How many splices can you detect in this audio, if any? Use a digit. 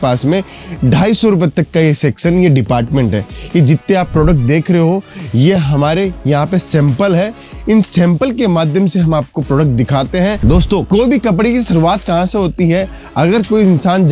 1